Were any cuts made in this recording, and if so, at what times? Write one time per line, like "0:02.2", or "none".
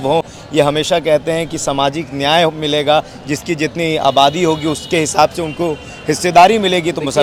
none